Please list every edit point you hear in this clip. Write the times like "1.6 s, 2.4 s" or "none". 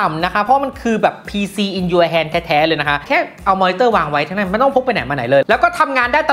3.0 s